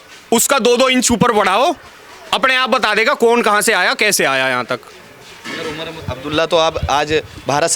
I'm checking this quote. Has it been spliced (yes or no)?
no